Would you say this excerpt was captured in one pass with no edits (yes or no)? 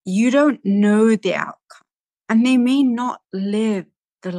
yes